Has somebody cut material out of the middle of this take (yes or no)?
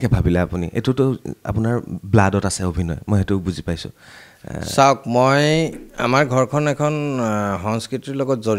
no